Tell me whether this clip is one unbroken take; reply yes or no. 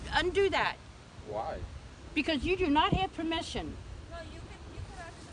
yes